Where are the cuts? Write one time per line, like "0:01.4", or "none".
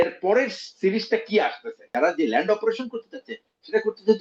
0:01.8